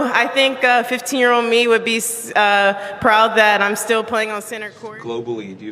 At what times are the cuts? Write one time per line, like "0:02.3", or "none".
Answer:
0:04.6

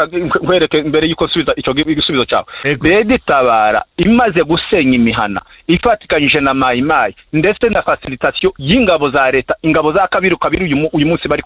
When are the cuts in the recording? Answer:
0:04.3

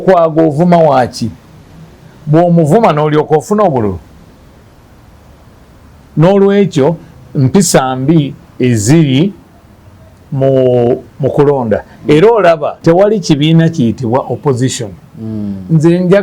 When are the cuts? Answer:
0:12.7

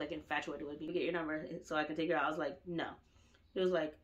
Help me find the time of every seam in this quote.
0:00.9

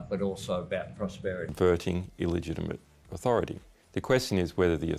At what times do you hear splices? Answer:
0:01.5

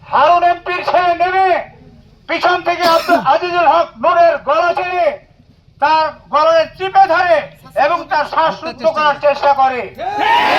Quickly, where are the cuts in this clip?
none

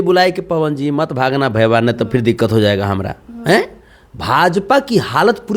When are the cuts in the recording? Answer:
none

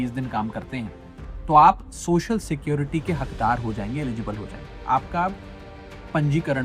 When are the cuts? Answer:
0:04.7

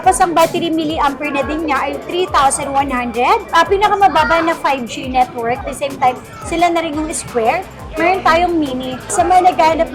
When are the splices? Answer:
0:03.5
0:05.6
0:09.1

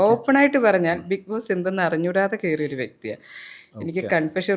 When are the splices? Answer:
none

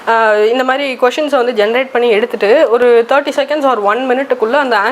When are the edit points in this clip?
none

